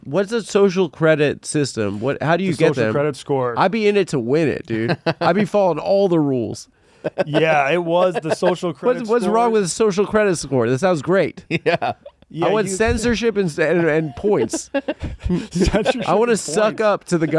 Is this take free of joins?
yes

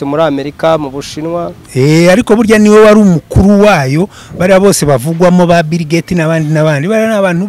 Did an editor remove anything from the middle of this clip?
no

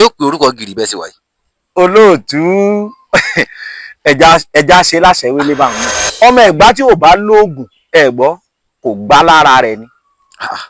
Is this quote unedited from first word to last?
no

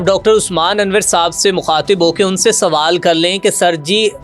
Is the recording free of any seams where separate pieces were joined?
yes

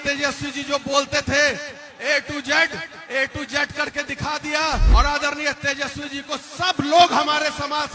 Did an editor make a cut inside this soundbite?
yes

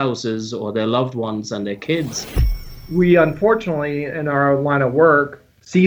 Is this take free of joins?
no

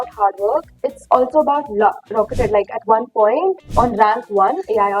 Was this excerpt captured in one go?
no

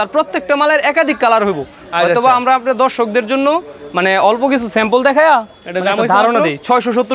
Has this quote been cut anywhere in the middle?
no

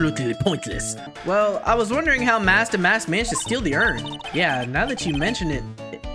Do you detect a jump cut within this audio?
yes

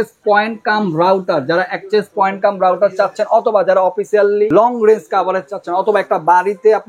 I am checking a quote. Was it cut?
yes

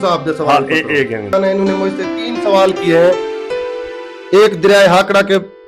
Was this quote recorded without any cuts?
no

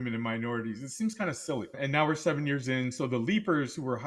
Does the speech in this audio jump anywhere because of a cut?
yes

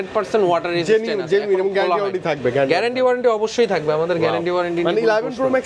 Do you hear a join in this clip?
no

